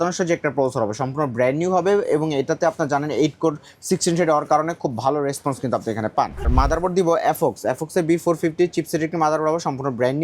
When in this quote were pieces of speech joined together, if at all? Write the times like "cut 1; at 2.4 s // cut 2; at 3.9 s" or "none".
cut 1; at 6.5 s

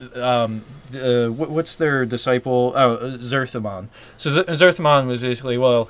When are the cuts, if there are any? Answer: cut 1; at 1.7 s

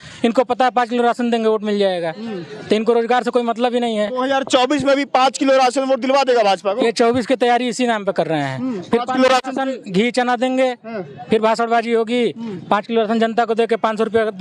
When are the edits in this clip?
none

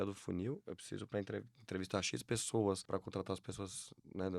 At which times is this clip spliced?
cut 1; at 2.8 s

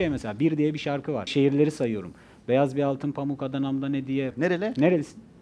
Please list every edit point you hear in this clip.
cut 1; at 1.3 s // cut 2; at 4.3 s

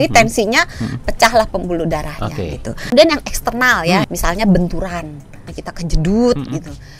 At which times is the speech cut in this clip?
cut 1; at 2.9 s // cut 2; at 4.1 s // cut 3; at 5.5 s

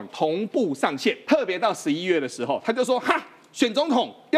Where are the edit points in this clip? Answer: cut 1; at 1.2 s

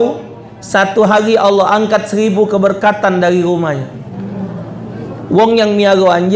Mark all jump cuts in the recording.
none

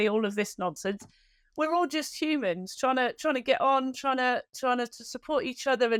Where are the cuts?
none

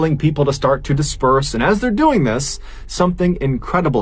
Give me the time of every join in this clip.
none

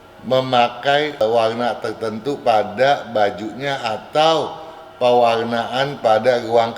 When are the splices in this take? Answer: cut 1; at 1.2 s

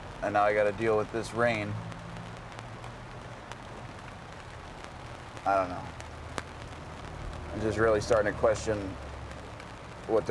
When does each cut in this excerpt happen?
none

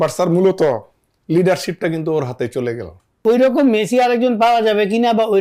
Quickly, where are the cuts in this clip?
cut 1; at 3.0 s

